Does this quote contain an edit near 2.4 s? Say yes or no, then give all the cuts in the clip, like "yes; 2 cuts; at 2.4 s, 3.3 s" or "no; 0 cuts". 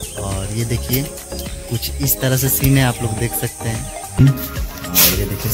no; 1 cut; at 4.2 s